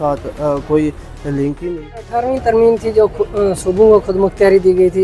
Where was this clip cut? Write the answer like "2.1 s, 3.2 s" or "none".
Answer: 1.7 s